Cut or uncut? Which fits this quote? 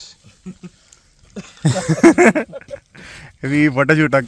uncut